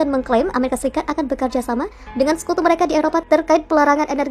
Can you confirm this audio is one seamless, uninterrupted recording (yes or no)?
no